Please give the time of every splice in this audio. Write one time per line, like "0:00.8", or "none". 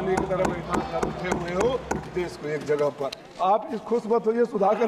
0:03.2